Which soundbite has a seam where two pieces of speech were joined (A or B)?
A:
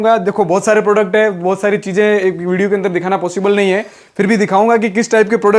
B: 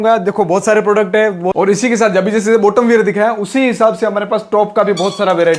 B